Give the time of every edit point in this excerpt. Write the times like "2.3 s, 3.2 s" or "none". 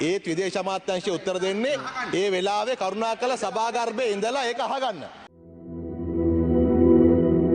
5.4 s